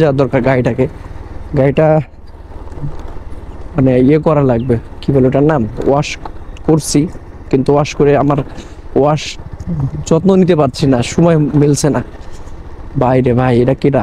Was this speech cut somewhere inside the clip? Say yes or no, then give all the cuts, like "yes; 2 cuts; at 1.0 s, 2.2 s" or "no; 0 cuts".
no; 0 cuts